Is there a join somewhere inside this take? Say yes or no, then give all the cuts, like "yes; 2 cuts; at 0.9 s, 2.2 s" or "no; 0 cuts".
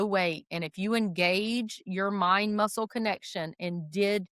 no; 0 cuts